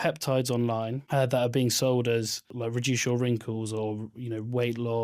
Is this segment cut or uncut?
cut